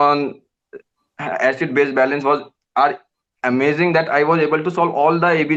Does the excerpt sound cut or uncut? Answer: uncut